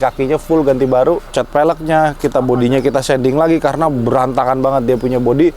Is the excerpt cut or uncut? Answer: cut